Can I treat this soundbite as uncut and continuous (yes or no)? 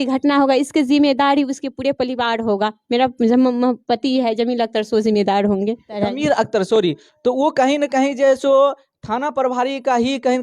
no